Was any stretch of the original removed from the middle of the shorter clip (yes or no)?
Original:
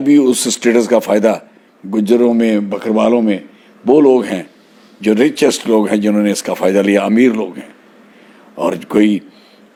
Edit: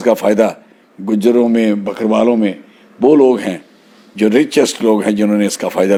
no